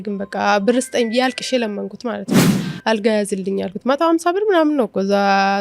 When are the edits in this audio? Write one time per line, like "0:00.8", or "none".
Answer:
0:02.6